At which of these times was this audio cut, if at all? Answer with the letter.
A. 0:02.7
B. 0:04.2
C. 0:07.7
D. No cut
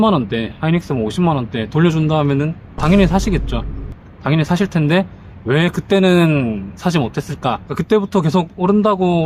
C